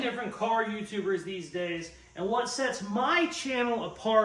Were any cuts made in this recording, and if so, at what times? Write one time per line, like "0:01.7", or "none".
none